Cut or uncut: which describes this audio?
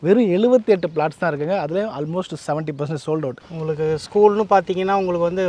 cut